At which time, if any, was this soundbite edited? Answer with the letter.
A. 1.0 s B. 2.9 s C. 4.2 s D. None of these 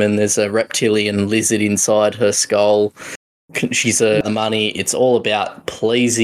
C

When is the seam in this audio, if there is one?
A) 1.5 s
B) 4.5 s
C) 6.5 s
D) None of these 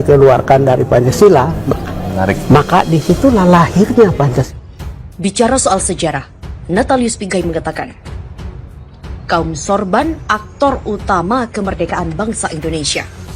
B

